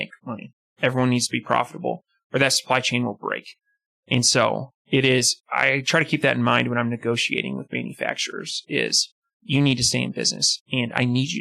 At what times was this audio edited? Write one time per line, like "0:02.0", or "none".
none